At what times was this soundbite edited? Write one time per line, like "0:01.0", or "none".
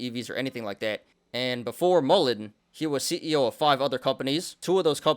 0:01.1